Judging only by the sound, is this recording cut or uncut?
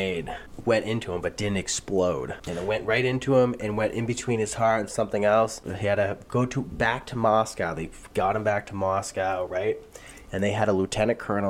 uncut